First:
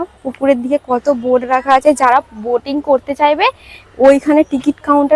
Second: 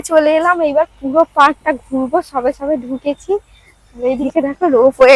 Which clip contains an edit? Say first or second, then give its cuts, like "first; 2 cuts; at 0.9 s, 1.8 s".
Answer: second; 1 cut; at 4.2 s